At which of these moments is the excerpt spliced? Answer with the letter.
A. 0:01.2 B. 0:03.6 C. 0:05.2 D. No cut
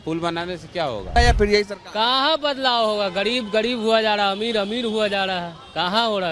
A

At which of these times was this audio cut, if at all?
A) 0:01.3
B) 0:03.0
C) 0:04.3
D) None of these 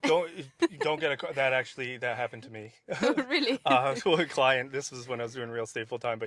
D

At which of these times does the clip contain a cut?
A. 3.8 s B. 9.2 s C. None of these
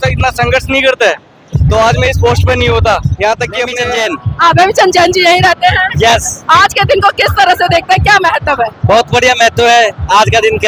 A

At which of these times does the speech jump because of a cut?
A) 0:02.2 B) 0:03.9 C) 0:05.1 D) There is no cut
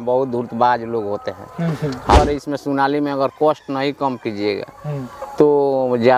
A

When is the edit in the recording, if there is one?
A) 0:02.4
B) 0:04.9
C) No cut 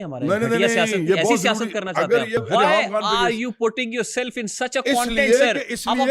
A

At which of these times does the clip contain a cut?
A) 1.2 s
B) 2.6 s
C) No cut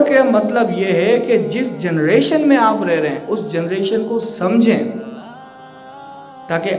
C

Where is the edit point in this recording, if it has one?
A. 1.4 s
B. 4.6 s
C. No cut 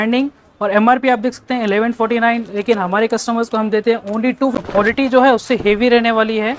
B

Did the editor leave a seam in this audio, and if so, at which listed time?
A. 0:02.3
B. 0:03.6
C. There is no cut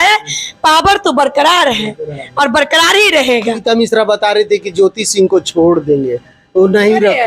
C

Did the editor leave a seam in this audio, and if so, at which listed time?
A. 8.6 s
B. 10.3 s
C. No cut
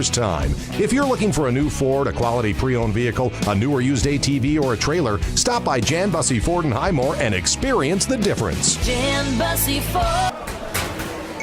B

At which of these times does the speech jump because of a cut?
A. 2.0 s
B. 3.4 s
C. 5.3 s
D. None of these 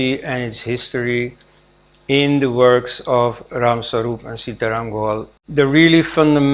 C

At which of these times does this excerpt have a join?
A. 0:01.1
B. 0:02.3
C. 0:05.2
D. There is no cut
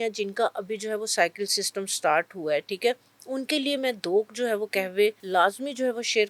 C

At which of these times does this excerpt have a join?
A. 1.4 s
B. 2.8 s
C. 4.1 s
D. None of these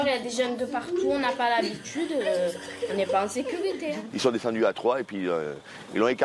C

